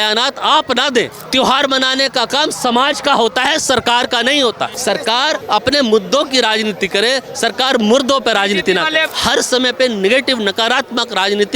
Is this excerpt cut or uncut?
cut